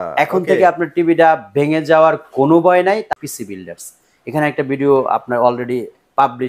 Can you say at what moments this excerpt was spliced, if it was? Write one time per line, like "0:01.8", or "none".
0:03.0